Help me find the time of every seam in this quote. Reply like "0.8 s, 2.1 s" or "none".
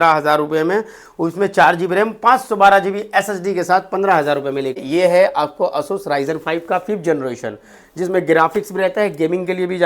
4.8 s